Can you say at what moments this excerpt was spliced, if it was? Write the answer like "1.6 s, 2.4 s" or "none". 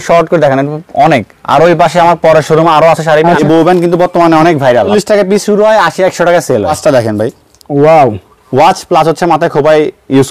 3.4 s, 4.9 s, 6.8 s